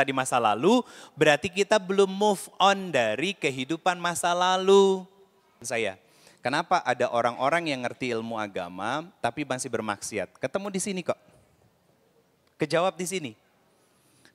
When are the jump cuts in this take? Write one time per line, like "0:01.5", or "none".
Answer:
0:05.6